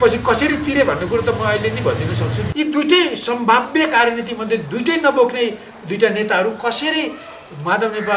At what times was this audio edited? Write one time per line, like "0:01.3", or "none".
0:02.4

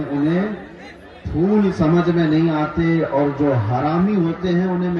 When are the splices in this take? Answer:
none

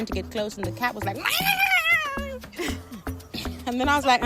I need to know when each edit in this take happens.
none

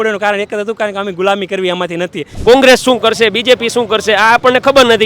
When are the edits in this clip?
0:02.2

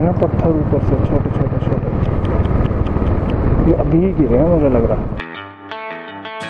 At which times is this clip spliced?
0:05.5

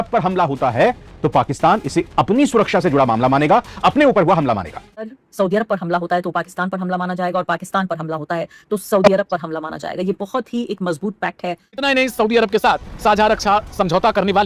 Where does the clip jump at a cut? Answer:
0:05.0
0:11.8

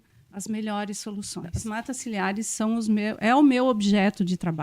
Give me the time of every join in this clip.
0:01.6

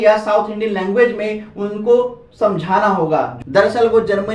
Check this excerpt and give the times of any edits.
0:03.4

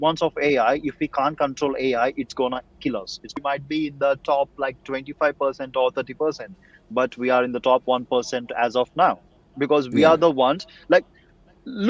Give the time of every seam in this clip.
0:03.3

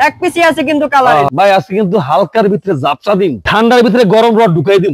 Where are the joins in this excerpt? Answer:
0:01.3

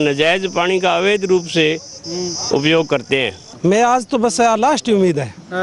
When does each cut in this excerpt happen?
0:03.4

